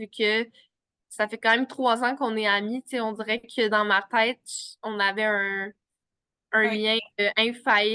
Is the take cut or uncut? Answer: uncut